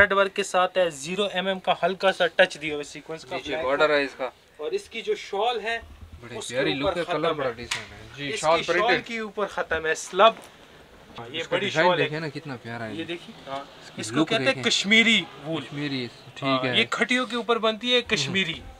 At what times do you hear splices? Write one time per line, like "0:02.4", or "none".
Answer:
0:11.1